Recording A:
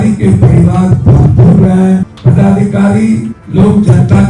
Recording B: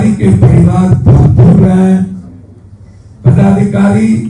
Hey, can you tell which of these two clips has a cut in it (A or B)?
A